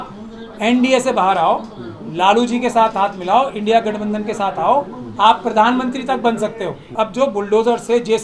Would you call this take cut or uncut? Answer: cut